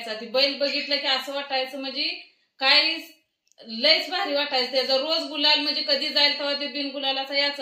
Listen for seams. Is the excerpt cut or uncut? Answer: uncut